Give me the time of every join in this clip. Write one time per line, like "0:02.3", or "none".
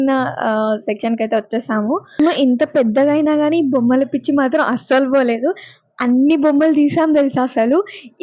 0:02.2